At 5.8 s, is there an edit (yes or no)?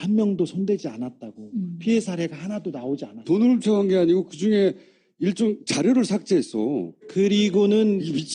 yes